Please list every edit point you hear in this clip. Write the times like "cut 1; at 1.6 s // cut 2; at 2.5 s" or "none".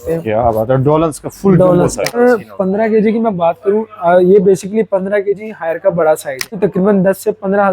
cut 1; at 2.2 s // cut 2; at 6.6 s